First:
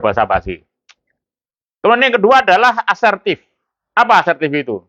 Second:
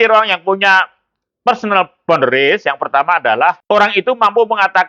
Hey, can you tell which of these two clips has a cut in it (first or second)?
second